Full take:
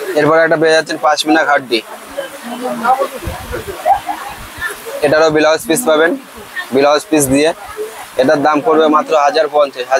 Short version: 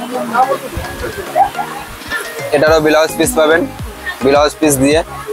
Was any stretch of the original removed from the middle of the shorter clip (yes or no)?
no